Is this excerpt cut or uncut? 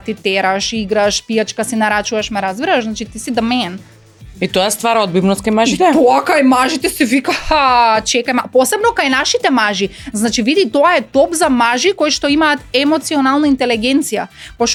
uncut